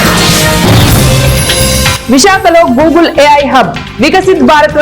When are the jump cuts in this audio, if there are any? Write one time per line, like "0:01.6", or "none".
0:01.6